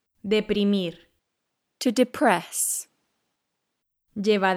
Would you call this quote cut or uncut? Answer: uncut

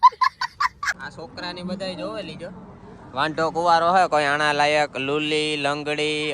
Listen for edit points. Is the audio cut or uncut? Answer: cut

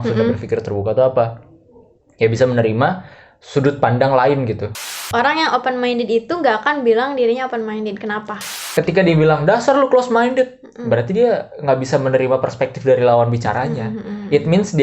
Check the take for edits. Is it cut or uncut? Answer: cut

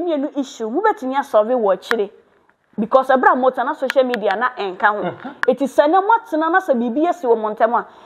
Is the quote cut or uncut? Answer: uncut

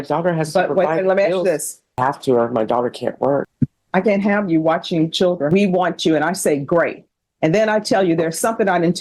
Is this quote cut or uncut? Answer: cut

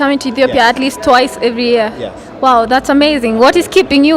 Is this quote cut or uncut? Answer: uncut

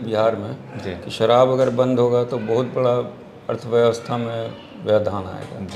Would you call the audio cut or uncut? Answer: uncut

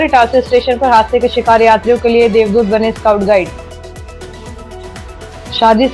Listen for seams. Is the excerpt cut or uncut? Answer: uncut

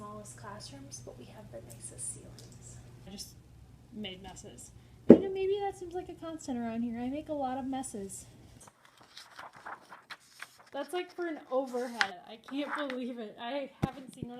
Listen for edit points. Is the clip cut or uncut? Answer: cut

